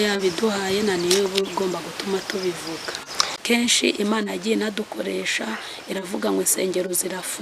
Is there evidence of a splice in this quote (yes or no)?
yes